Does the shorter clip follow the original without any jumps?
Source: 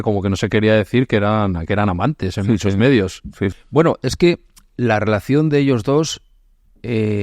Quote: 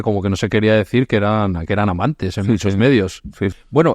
yes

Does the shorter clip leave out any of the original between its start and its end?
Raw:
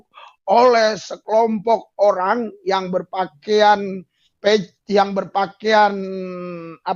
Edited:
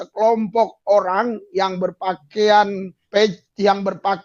yes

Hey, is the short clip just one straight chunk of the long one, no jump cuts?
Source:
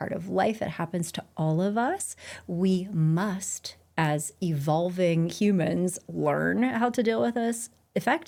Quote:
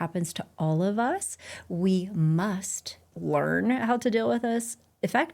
no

